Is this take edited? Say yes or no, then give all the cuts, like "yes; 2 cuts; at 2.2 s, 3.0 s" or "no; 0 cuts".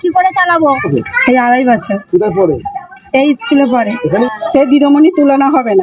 yes; 2 cuts; at 0.9 s, 4.3 s